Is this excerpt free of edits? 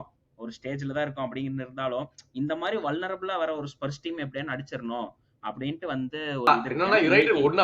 no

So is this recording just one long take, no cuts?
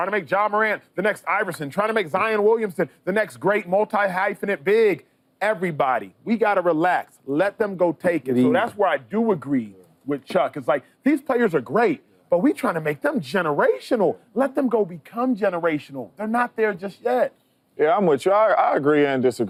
yes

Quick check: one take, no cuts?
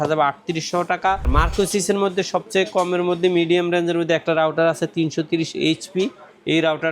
no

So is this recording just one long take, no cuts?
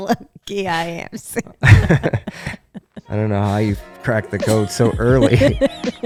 yes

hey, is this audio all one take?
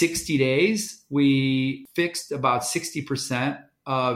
no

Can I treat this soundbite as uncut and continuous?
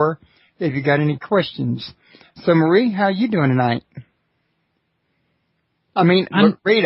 yes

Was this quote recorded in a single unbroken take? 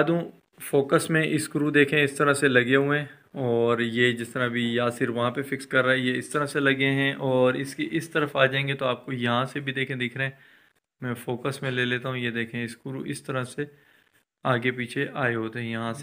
yes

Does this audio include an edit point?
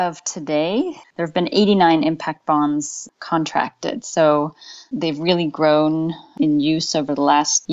yes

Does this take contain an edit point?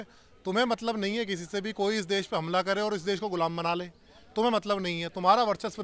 no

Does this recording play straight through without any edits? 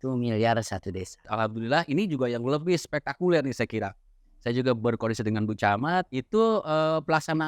no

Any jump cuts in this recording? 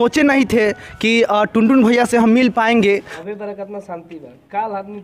yes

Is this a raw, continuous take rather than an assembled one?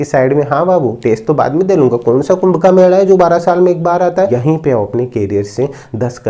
no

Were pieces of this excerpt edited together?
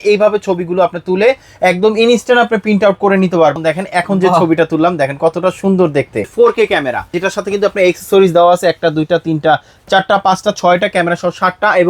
yes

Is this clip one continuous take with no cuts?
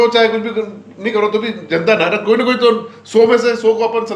yes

